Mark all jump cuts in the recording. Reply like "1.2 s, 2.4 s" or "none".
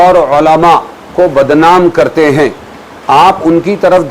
none